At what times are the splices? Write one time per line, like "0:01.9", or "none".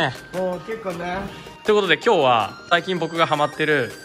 0:01.6